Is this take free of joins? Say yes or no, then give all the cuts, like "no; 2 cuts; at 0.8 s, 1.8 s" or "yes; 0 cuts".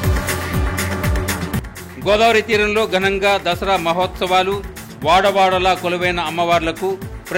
no; 1 cut; at 1.4 s